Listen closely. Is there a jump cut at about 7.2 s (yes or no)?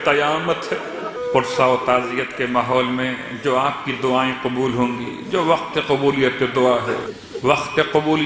yes